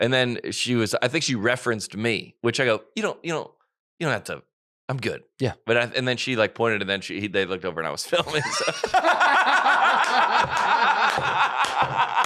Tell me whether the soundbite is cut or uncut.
uncut